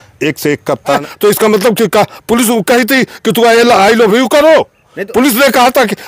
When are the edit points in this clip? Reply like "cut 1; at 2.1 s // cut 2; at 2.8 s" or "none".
cut 1; at 1.0 s